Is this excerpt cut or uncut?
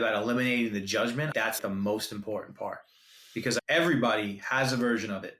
cut